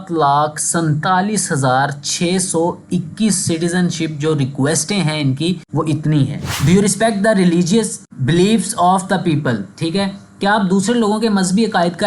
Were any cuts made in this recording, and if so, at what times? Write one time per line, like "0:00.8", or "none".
0:06.5